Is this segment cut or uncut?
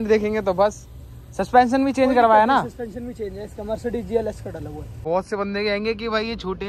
cut